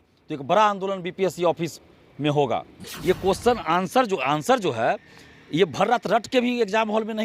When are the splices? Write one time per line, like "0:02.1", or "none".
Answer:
0:02.8